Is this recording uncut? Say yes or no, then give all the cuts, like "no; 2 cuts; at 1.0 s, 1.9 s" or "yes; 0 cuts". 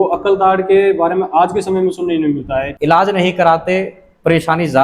no; 1 cut; at 2.7 s